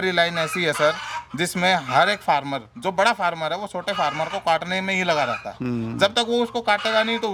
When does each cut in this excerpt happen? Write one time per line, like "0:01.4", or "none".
none